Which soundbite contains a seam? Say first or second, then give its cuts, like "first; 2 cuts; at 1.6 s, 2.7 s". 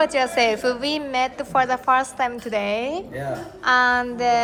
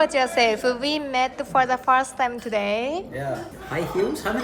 second; 1 cut; at 3.5 s